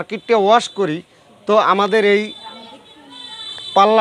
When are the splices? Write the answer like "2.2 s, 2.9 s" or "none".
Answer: none